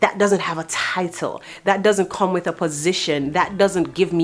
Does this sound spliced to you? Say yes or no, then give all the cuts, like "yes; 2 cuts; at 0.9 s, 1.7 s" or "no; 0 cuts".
no; 0 cuts